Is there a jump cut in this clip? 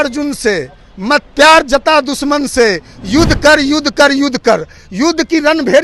no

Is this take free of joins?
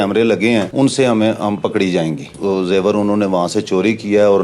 no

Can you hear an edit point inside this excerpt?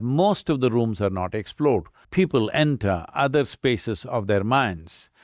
yes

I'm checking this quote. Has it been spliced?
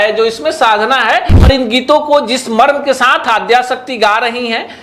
yes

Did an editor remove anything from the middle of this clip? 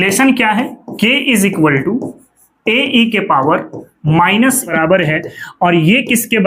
yes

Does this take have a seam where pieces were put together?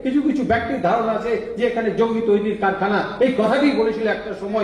no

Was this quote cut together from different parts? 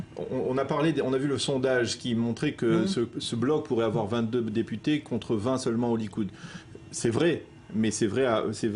no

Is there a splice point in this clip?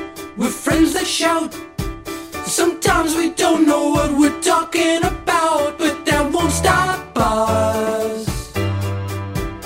no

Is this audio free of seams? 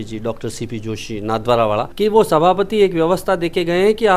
no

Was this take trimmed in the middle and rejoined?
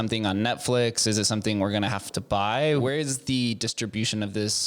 yes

